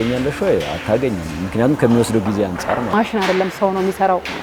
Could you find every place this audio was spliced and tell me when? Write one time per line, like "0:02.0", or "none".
0:02.9